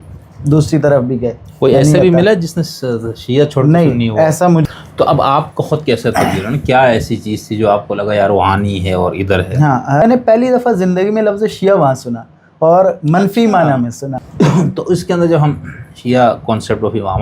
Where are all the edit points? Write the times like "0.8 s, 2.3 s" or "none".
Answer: 4.6 s, 10.0 s, 14.1 s